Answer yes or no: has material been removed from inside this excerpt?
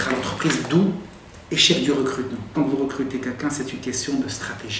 yes